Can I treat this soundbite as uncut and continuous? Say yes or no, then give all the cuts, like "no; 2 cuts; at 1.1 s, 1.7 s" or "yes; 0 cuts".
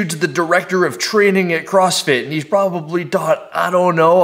yes; 0 cuts